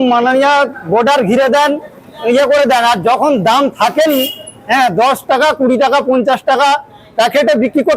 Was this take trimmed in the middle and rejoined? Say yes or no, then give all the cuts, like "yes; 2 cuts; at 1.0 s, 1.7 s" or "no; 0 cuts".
no; 0 cuts